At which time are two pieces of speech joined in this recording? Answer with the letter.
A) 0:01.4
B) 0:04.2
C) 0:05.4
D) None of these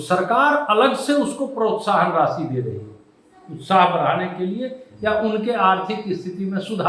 D